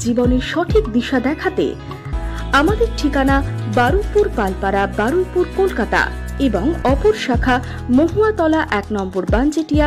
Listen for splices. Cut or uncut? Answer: cut